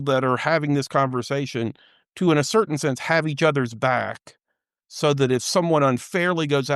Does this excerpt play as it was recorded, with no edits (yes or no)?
yes